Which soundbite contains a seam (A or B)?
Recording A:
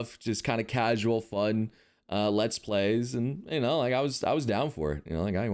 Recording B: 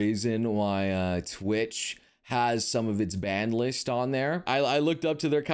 B